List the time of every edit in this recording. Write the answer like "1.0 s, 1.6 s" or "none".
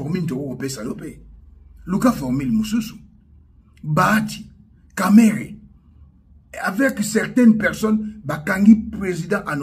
none